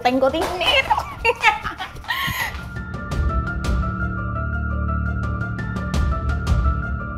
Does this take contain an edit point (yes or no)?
no